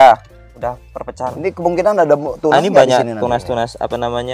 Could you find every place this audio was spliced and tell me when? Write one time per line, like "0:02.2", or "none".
0:01.2